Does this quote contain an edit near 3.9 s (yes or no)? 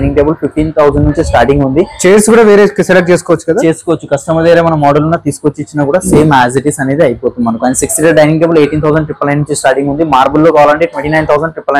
no